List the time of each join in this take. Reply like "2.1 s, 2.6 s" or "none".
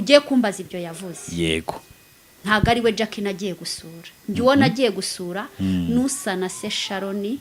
none